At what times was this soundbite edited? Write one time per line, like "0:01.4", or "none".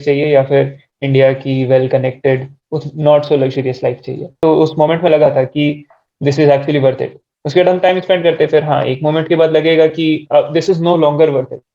0:04.4